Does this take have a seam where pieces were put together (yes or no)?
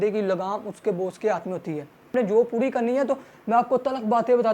yes